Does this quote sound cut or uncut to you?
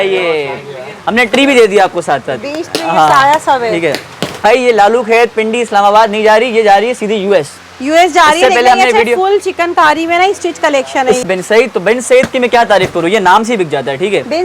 cut